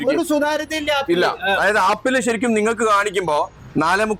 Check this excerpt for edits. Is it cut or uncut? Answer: uncut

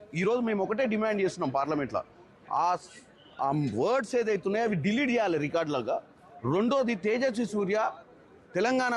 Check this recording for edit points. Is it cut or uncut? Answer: cut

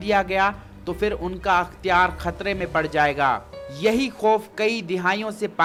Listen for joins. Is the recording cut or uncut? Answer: uncut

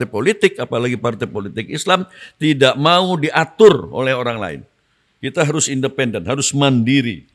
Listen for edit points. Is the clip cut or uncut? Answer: uncut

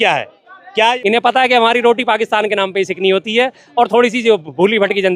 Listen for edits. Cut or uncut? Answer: cut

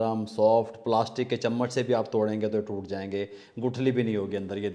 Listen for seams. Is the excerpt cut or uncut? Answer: uncut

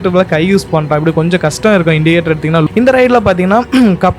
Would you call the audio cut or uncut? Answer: cut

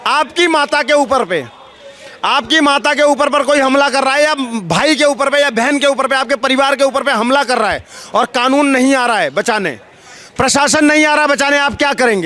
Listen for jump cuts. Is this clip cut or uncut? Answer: uncut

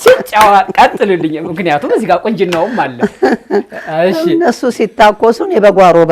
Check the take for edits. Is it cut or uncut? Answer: uncut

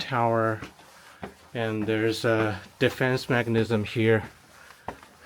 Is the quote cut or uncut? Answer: uncut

